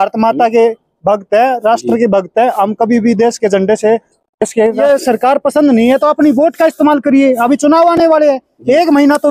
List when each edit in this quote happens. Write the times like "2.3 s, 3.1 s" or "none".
4.8 s